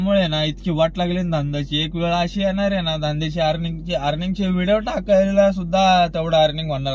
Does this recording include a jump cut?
no; 0 cuts

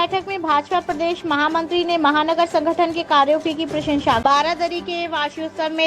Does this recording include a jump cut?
yes; 1 cut; at 4.2 s

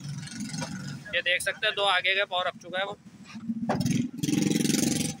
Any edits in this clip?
no; 0 cuts

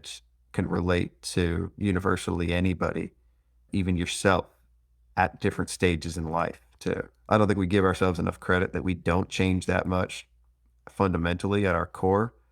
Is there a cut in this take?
no; 0 cuts

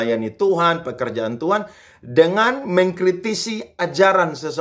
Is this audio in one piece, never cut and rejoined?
yes; 0 cuts

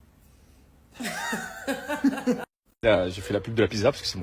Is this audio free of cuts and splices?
no; 1 cut; at 2.7 s

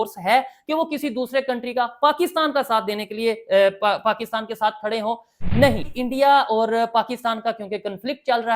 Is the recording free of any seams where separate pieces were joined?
no; 1 cut; at 5.9 s

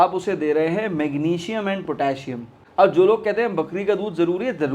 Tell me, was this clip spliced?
yes; 1 cut; at 2.5 s

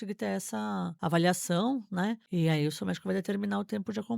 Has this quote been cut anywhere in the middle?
yes; 2 cuts; at 0.9 s, 2.2 s

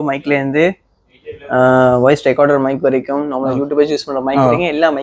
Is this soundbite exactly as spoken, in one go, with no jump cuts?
yes; 0 cuts

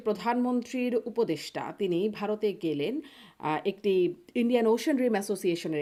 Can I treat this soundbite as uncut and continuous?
yes; 0 cuts

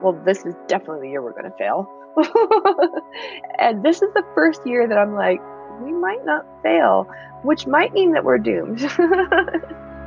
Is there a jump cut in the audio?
no; 0 cuts

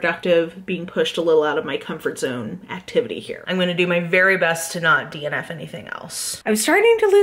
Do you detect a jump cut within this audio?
yes; 2 cuts; at 3.5 s, 6.3 s

